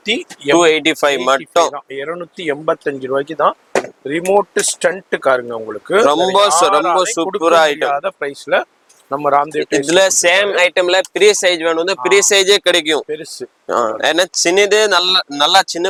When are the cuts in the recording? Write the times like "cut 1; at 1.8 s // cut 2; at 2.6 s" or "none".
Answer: none